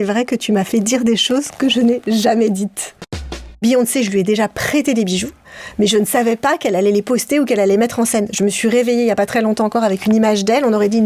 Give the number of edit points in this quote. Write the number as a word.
one